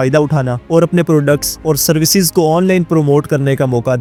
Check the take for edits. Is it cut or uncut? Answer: uncut